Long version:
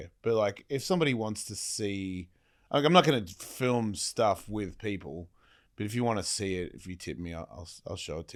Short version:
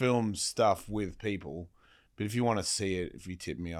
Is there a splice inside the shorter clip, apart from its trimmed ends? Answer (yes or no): no